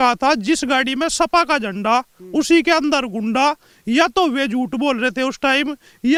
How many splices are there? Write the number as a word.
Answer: zero